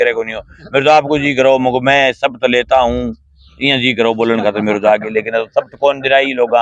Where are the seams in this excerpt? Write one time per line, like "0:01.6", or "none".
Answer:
none